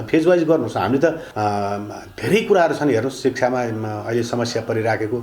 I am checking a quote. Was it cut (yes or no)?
yes